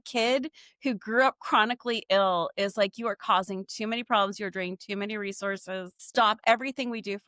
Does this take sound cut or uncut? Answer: cut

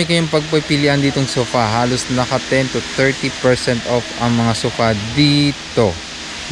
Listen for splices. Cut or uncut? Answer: uncut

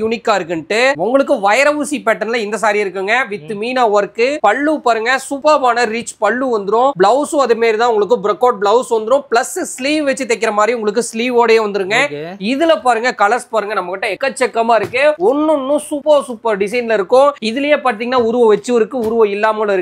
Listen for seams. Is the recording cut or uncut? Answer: uncut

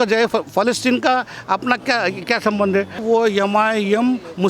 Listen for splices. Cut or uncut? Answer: cut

